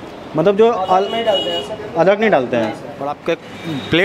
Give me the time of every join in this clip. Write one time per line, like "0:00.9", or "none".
0:03.1